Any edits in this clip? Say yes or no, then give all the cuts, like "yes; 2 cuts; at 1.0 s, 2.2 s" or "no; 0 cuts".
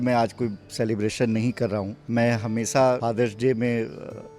yes; 2 cuts; at 2.0 s, 3.0 s